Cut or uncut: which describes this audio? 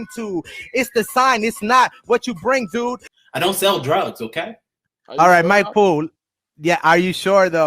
cut